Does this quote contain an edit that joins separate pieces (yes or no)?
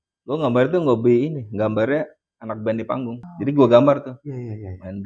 yes